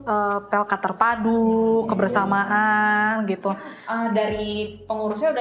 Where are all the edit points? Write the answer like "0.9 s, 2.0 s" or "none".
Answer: 3.7 s